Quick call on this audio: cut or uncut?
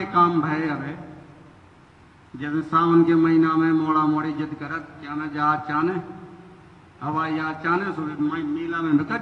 uncut